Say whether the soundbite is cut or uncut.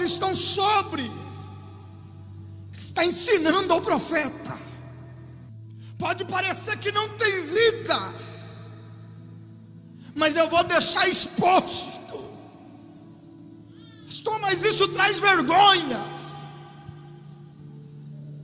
cut